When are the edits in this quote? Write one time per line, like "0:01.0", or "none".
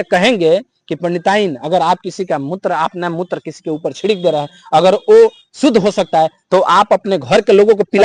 none